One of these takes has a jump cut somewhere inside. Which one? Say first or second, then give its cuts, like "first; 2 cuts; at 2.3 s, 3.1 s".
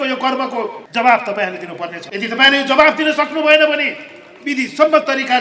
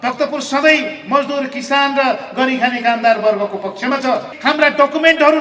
second; 1 cut; at 4.3 s